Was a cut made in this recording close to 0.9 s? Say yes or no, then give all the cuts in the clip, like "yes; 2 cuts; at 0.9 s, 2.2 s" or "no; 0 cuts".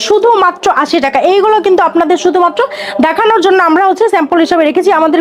no; 0 cuts